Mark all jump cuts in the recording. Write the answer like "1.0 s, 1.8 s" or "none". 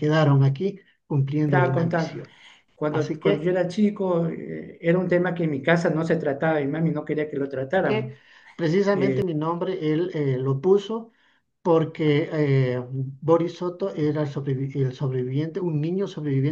1.5 s, 7.9 s